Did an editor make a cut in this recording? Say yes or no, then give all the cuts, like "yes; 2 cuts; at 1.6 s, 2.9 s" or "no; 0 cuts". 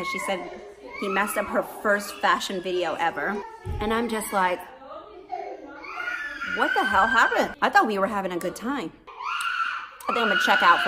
yes; 3 cuts; at 3.5 s, 7.5 s, 9.1 s